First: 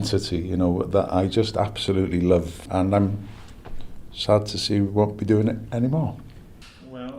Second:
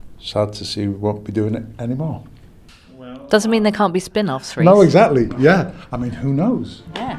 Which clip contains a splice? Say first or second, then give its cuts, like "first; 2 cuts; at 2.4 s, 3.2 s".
first; 1 cut; at 2.6 s